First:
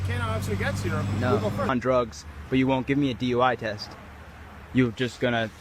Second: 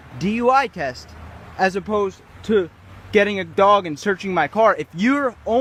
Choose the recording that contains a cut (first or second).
first